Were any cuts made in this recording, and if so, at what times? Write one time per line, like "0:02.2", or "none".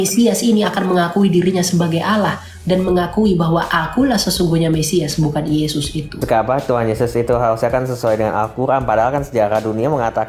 0:06.2